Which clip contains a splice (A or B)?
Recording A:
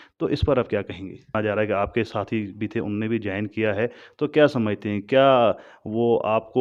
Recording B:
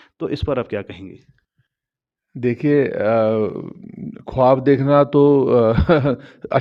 A